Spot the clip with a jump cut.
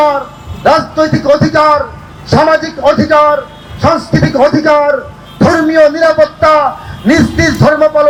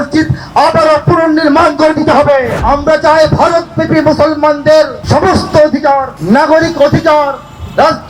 second; 3 cuts; at 2.6 s, 5.0 s, 6.1 s

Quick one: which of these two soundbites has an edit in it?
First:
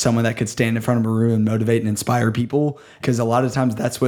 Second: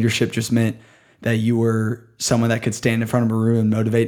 first; 1 cut; at 2.9 s

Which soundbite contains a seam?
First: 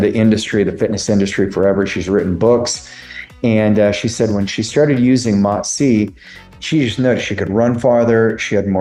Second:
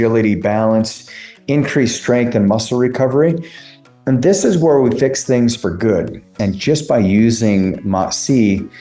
second; 1 cut; at 6.3 s

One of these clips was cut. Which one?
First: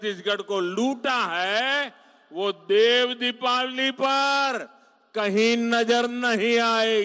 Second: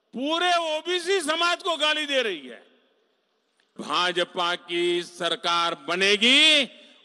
second; 1 cut; at 3.7 s

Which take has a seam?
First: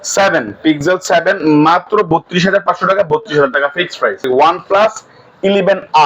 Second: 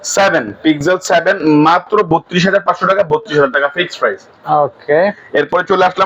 first; 1 cut; at 4.2 s

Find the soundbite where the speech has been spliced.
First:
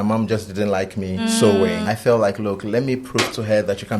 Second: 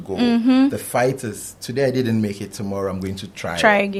first; 2 cuts; at 1.2 s, 1.8 s

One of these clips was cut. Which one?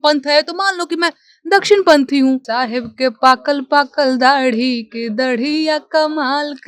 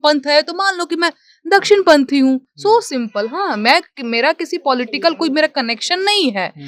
first; 1 cut; at 2.5 s

